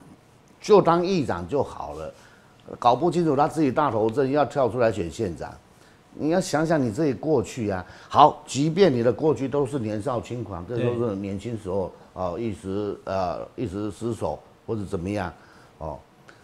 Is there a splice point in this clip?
no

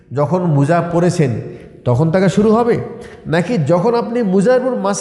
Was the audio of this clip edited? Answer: no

